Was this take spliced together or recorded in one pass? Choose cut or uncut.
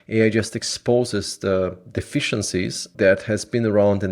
cut